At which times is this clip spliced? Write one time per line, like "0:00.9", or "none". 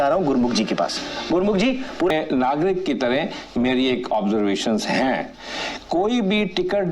0:02.1

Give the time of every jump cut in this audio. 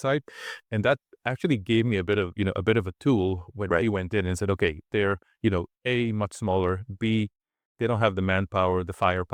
none

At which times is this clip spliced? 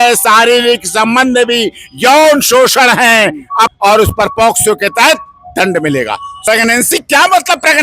0:03.7
0:06.3

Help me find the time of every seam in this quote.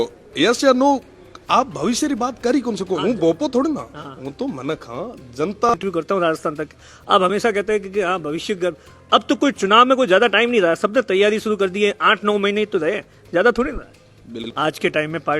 0:05.7
0:14.4

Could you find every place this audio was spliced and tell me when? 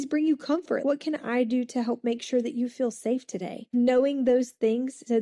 0:00.8
0:03.7

